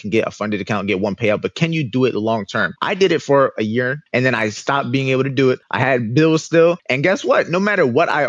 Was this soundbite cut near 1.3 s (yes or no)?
no